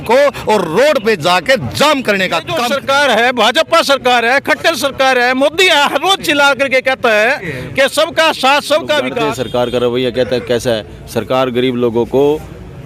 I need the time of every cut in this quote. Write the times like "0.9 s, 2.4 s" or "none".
2.6 s, 9.1 s